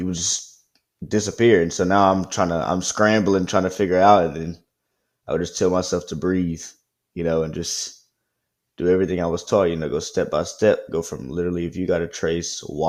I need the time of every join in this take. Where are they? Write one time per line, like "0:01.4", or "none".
none

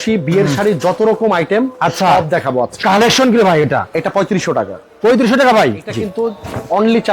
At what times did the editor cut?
0:02.8
0:06.0

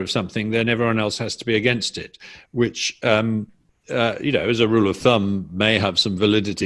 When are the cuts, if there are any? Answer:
none

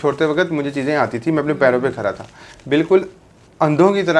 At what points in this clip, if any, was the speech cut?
none

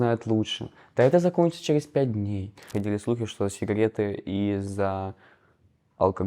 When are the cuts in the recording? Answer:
0:02.6

